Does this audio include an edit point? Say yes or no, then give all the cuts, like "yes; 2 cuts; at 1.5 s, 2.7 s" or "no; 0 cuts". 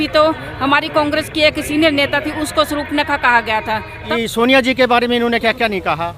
yes; 1 cut; at 4.0 s